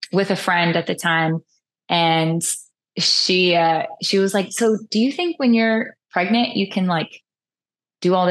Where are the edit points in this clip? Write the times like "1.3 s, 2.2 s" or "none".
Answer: none